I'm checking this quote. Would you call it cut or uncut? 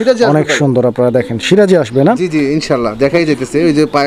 uncut